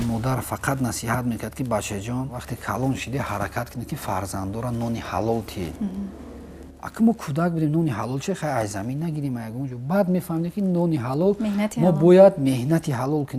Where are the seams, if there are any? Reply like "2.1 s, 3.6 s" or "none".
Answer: 2.5 s